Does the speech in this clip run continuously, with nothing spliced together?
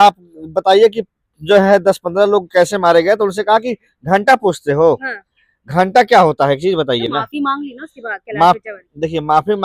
yes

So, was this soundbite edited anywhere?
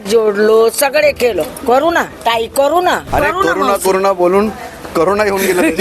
yes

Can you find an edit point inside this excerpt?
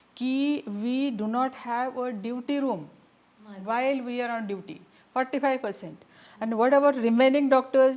no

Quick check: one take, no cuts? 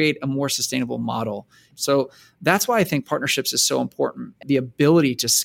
no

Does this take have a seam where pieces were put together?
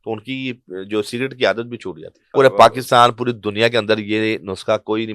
yes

